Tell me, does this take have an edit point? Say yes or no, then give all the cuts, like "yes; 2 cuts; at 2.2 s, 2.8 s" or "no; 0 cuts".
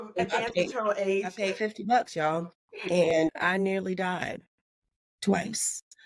yes; 2 cuts; at 1.3 s, 3.1 s